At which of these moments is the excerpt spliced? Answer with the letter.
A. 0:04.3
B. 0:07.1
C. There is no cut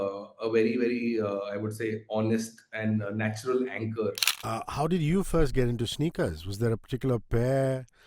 A